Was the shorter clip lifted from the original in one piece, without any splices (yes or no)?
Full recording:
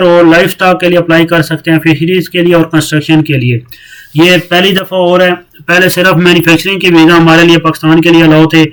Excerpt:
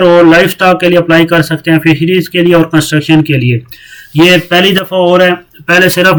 yes